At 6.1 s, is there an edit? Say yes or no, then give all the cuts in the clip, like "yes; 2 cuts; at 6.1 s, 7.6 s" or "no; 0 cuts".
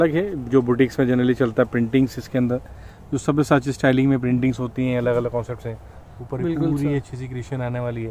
no; 0 cuts